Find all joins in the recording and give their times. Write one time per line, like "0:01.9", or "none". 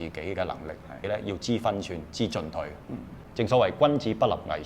0:01.0
0:03.2